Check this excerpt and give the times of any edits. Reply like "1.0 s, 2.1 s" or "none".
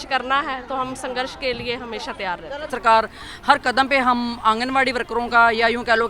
2.7 s